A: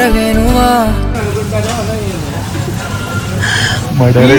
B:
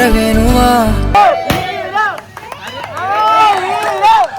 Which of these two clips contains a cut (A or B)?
B